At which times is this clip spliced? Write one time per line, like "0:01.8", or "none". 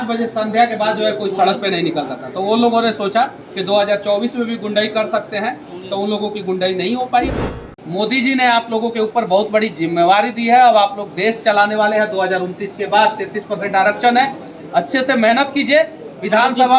0:07.6